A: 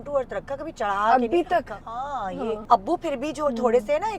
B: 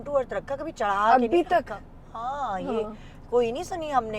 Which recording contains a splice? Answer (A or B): A